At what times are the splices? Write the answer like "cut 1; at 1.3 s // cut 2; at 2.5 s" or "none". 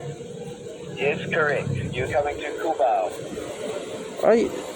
cut 1; at 3.5 s